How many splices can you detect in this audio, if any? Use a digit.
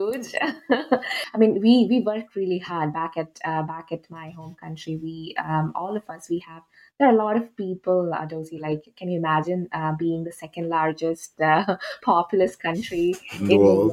0